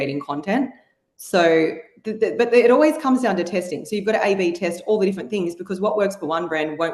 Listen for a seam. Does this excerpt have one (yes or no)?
no